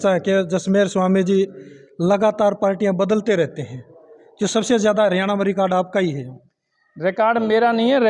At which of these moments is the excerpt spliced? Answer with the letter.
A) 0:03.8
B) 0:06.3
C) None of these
C